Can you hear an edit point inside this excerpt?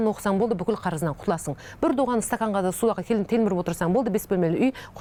no; 0 cuts

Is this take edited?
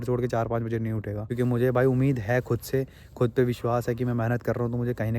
yes; 1 cut; at 1.2 s

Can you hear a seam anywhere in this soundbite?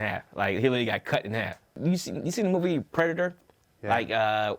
no; 0 cuts

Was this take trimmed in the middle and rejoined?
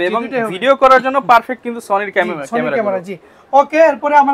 no; 0 cuts

